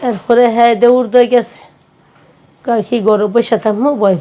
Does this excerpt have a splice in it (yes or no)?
no